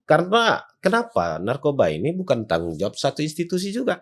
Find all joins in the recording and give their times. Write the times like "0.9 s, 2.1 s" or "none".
none